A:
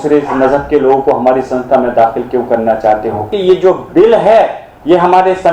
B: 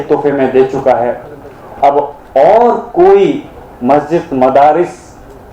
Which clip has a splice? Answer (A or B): A